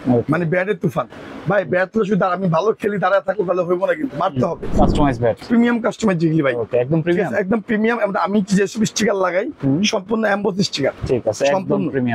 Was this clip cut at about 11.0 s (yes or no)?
yes